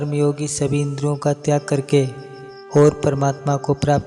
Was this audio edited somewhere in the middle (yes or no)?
no